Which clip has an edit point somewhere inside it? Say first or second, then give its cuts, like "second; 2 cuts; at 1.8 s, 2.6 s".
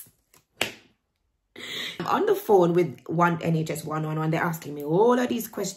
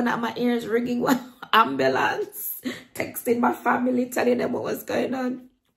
first; 1 cut; at 2.0 s